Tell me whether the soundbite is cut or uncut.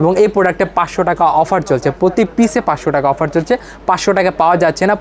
uncut